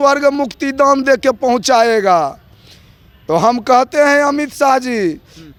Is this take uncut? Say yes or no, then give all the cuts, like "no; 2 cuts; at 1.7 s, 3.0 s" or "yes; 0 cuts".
yes; 0 cuts